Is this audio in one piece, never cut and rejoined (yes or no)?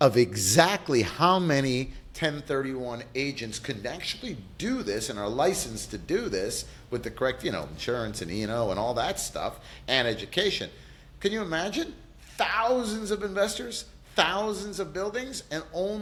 yes